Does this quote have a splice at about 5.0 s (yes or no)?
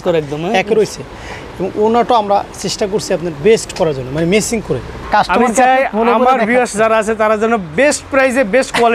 yes